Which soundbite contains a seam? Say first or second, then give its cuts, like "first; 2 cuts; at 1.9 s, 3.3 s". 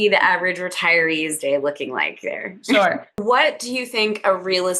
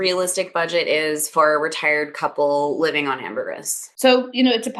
first; 1 cut; at 3.2 s